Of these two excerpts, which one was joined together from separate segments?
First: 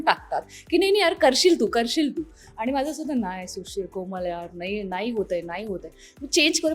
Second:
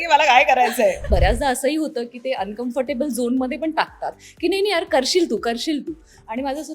second; 1 cut; at 1.1 s

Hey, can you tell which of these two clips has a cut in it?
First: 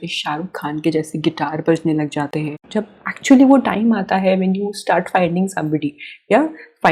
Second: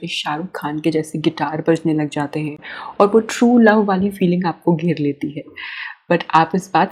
first; 1 cut; at 2.7 s

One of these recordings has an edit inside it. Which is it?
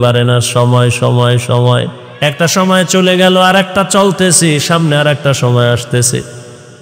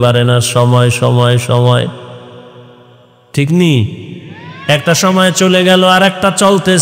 first; 1 cut; at 2.0 s

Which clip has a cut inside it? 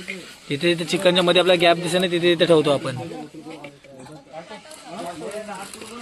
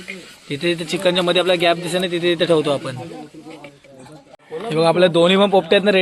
second; 1 cut; at 4.5 s

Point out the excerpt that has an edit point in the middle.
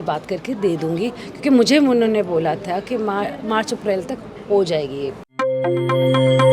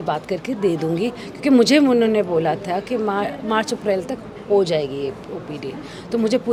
first; 1 cut; at 5.2 s

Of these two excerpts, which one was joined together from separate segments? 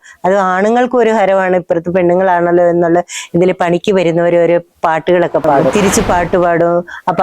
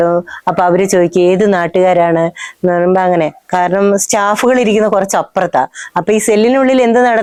first; 1 cut; at 5.7 s

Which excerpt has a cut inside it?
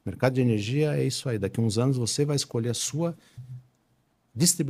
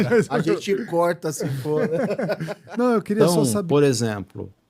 second; 1 cut; at 3.4 s

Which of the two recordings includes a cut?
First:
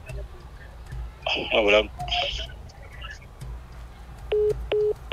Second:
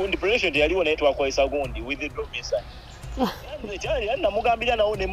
second; 1 cut; at 3.7 s

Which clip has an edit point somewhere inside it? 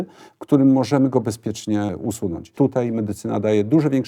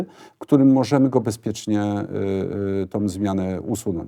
first; 1 cut; at 1.9 s

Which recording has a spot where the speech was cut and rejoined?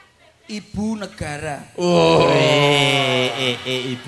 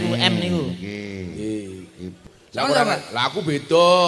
second; 1 cut; at 2.2 s

